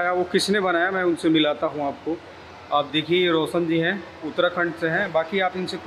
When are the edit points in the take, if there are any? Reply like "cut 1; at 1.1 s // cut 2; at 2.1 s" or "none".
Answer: none